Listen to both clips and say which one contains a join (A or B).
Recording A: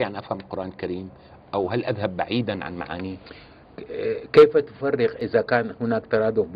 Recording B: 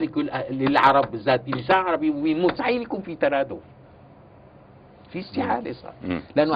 A